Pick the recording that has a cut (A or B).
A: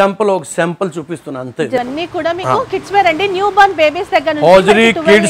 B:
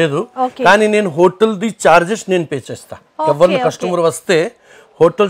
A